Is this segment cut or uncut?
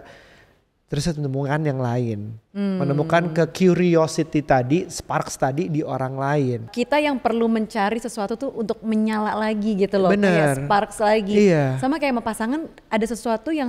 cut